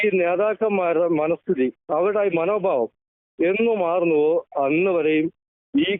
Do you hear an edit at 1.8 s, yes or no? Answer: no